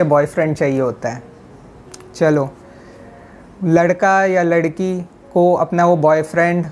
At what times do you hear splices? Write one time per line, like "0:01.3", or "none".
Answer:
none